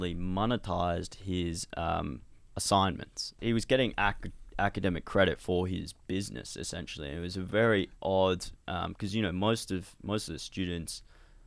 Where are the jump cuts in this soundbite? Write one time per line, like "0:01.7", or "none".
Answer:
0:03.4

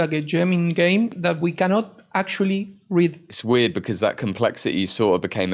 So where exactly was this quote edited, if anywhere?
0:01.2
0:03.3

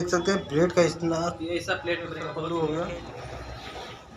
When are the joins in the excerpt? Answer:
0:02.2

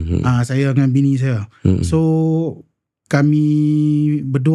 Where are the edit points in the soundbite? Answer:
none

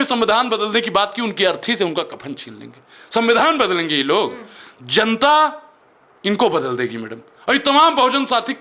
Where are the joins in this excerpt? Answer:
none

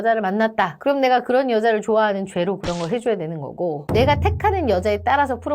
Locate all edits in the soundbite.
0:03.8

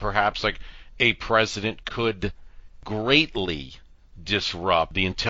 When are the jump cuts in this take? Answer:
0:02.8

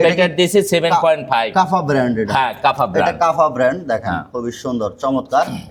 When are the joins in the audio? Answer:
none

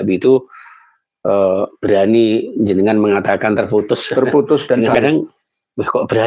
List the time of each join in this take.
0:05.0

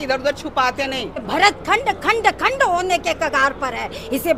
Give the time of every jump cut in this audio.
0:01.3

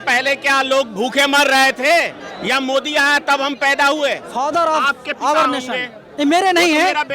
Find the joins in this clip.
0:02.3
0:04.2

